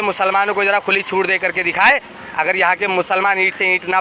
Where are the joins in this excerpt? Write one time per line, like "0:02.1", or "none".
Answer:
none